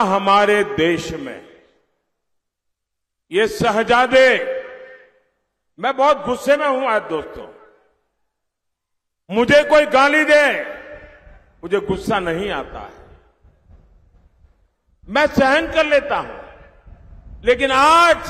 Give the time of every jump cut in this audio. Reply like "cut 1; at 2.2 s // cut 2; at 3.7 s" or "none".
none